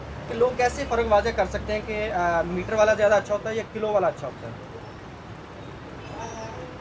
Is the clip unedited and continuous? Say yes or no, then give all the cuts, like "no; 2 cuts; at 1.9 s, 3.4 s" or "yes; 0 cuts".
yes; 0 cuts